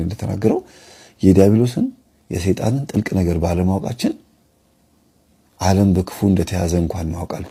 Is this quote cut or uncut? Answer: uncut